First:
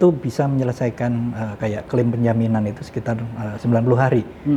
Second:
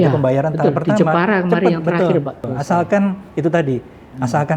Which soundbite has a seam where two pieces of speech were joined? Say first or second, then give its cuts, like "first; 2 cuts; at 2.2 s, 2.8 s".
second; 1 cut; at 2.4 s